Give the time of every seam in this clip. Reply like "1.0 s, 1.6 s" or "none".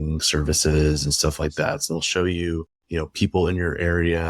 1.8 s